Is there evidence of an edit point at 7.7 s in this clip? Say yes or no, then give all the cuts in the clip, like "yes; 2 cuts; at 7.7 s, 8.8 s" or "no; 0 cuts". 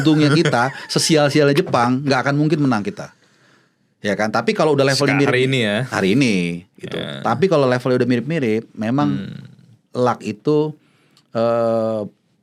no; 0 cuts